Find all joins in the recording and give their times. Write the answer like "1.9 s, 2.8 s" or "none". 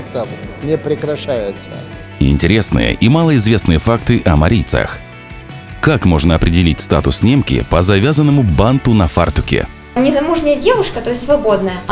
2.1 s